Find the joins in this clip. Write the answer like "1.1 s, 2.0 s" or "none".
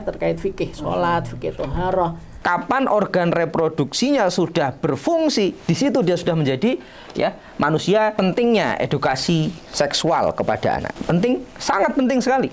2.3 s, 8.2 s, 10.9 s